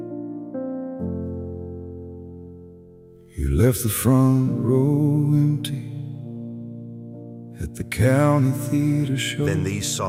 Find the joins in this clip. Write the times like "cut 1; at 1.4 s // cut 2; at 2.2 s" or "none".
none